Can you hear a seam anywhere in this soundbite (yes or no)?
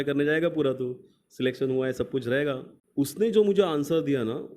yes